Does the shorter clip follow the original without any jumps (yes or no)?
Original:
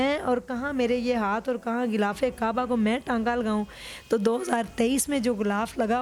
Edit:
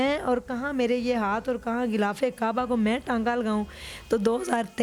yes